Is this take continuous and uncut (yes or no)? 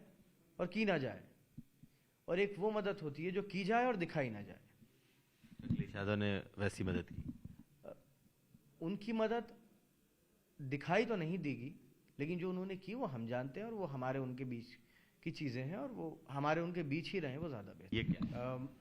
no